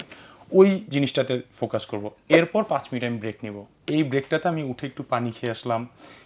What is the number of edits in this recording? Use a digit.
1